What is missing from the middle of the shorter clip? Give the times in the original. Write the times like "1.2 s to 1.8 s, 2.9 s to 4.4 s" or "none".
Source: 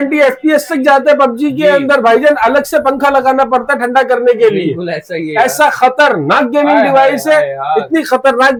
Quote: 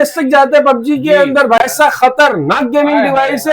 2.1 s to 5.4 s